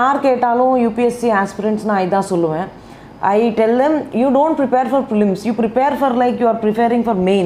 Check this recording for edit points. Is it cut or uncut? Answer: uncut